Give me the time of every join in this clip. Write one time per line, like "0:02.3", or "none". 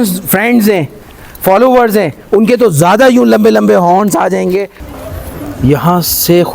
0:04.8